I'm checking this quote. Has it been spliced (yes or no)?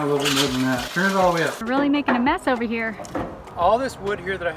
yes